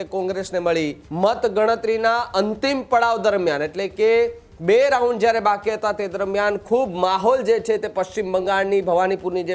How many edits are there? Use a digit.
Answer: 1